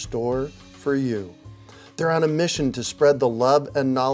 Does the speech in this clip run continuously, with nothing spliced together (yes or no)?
yes